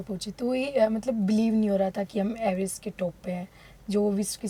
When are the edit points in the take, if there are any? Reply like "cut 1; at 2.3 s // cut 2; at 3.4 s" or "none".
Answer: none

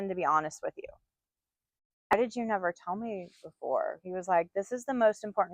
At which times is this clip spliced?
cut 1; at 2.1 s

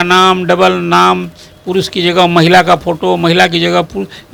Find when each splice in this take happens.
none

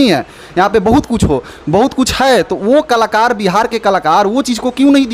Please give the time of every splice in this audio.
none

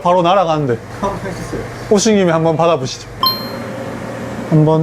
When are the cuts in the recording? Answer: cut 1; at 3.2 s

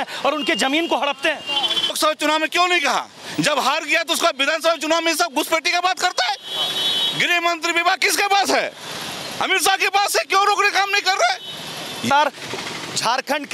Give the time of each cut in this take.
cut 1; at 2.0 s // cut 2; at 12.1 s

